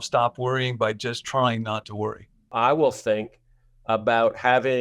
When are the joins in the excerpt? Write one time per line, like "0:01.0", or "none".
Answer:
0:02.5